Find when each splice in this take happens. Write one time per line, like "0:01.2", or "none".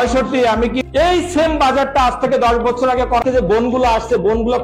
0:00.8
0:03.2